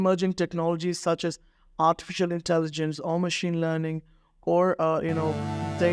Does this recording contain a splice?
no; 0 cuts

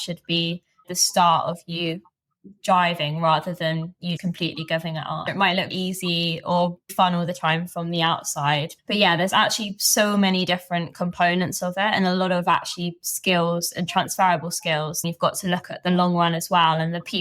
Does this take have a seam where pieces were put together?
yes; 2 cuts; at 5.3 s, 15.0 s

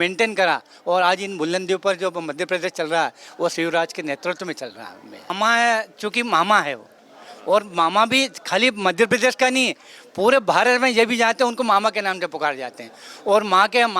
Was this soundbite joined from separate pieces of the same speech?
yes; 1 cut; at 5.3 s

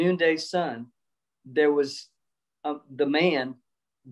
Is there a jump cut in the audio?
no; 0 cuts

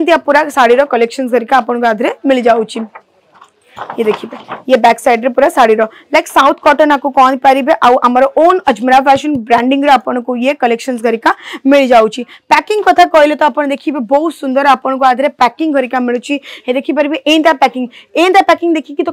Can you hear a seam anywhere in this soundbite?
no; 0 cuts

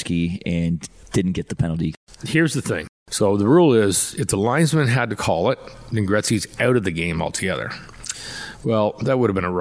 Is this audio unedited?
no; 3 cuts; at 0.9 s, 1.9 s, 3.0 s

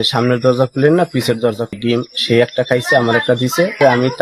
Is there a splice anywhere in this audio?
yes; 1 cut; at 1.8 s

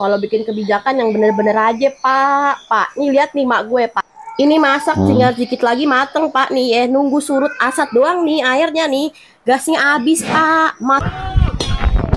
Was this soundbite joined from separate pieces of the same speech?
yes; 1 cut; at 11.0 s

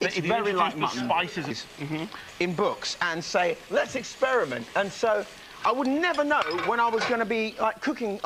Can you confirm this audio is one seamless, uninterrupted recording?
yes; 0 cuts

